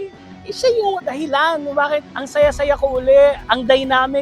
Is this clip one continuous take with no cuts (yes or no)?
no